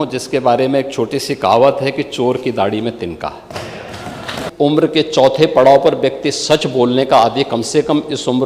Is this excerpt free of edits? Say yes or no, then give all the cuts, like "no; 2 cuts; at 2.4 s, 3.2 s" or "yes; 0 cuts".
no; 1 cut; at 4.4 s